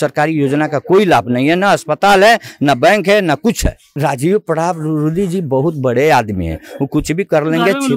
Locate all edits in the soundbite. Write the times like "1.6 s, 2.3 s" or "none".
3.9 s